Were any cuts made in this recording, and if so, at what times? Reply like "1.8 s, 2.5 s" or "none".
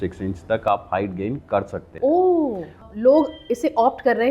1.8 s, 2.9 s

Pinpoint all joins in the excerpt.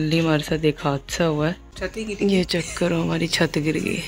1.7 s

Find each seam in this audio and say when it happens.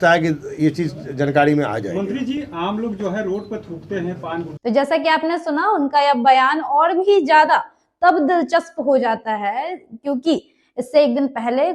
none

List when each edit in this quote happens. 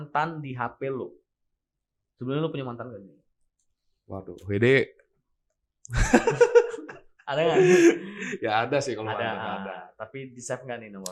none

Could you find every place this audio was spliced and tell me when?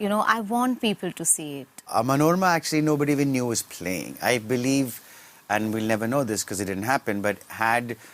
1.9 s

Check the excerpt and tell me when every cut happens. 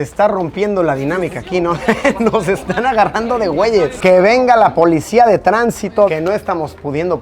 6.1 s

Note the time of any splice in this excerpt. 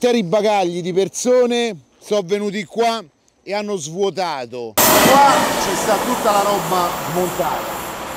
4.8 s

